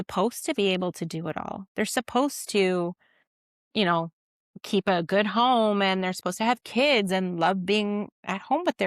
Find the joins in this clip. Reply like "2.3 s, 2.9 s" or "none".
none